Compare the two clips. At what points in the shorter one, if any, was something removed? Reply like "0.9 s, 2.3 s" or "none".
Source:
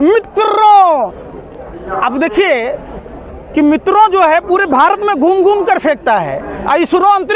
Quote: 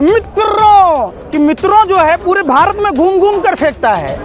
1.2 s